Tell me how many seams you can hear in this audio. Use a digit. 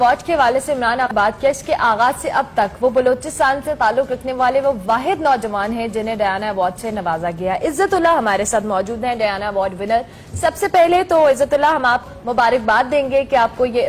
1